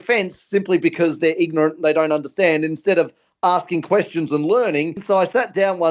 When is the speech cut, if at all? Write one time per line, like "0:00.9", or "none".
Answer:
0:05.0